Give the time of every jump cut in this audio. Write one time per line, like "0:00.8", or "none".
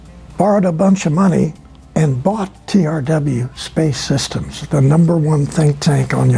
none